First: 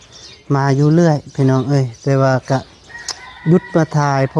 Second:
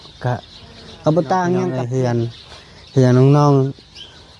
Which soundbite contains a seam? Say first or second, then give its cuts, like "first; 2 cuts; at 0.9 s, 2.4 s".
second; 1 cut; at 1.8 s